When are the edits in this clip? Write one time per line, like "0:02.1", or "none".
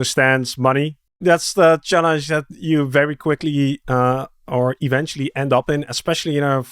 0:01.0